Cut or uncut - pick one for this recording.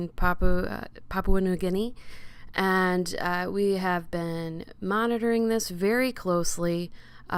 uncut